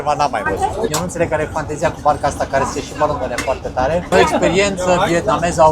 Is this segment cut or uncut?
cut